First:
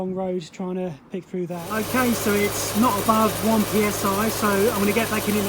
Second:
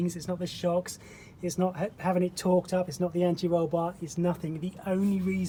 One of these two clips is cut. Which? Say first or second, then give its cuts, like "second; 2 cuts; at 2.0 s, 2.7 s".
first; 1 cut; at 1.7 s